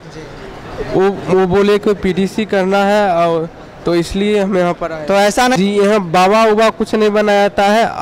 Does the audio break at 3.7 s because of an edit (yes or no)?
no